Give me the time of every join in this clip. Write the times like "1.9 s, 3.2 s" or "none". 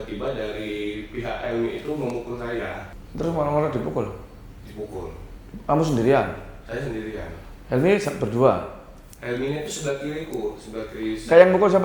2.9 s